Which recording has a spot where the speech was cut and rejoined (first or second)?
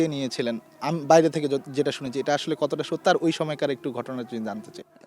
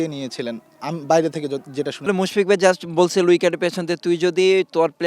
second